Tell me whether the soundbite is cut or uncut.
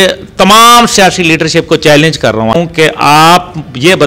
cut